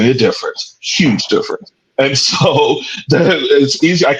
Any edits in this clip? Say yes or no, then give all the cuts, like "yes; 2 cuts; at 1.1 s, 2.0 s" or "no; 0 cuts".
no; 0 cuts